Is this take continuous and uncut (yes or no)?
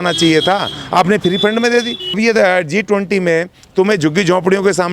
no